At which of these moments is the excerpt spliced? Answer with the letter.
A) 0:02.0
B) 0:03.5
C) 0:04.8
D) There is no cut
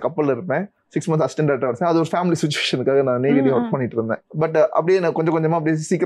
D